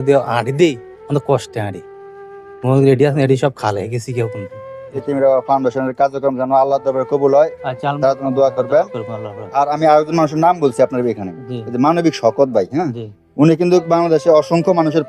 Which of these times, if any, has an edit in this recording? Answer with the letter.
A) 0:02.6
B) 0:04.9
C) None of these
B